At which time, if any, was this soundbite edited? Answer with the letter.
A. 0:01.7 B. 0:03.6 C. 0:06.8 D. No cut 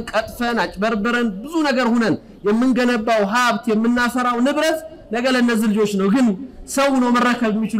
D